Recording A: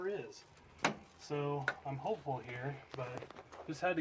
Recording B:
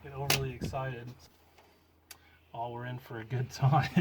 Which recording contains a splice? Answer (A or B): B